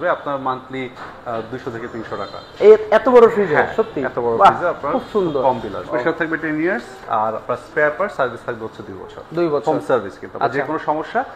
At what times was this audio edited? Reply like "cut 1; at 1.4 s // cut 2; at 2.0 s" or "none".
cut 1; at 5.9 s